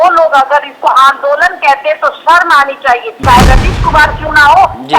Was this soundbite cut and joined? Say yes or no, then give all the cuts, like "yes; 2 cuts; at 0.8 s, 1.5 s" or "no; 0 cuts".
yes; 1 cut; at 3.2 s